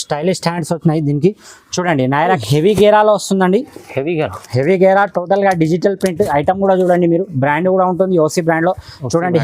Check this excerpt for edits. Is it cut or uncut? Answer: cut